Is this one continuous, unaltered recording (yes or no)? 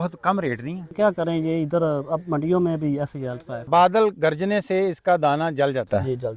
no